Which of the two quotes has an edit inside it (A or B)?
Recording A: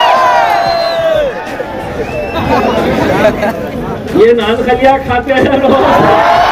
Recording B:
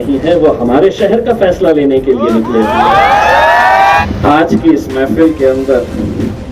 B